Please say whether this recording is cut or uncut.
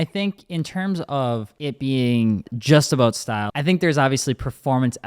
cut